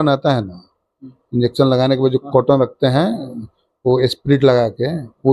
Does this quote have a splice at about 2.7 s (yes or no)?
no